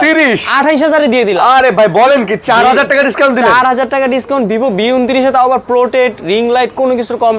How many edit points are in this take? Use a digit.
0